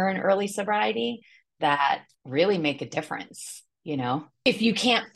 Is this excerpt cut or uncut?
cut